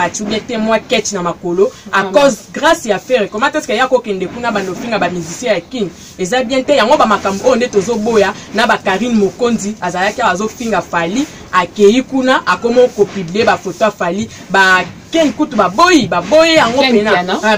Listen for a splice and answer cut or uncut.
uncut